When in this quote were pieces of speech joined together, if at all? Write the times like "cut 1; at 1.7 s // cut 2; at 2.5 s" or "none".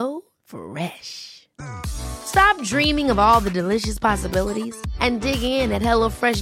none